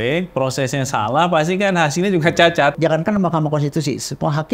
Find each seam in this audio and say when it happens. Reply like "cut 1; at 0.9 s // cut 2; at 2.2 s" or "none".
cut 1; at 2.8 s